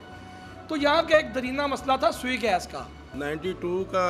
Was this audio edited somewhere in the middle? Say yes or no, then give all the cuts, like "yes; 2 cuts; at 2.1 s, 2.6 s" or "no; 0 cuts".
yes; 1 cut; at 3.1 s